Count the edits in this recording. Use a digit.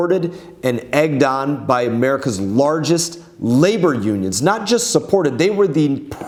0